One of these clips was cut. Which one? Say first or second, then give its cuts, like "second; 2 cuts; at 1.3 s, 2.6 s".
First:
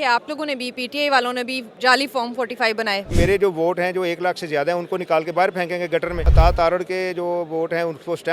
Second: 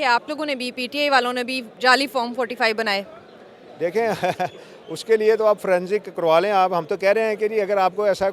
first; 2 cuts; at 3.1 s, 6.3 s